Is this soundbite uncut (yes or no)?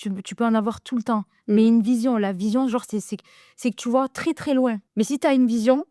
no